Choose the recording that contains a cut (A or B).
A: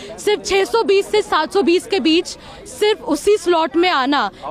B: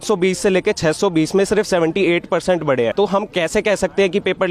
B